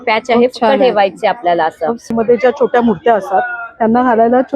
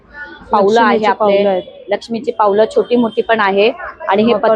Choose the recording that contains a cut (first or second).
first